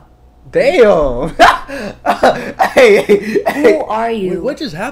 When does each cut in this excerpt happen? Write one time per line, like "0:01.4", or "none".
none